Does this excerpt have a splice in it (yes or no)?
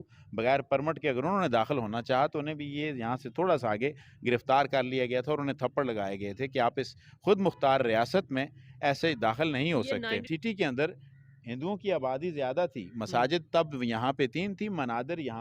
yes